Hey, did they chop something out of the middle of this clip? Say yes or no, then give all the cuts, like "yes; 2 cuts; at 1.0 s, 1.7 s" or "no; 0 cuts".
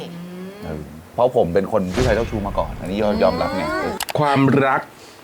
yes; 2 cuts; at 1.0 s, 3.9 s